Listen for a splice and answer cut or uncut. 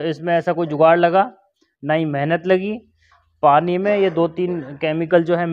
uncut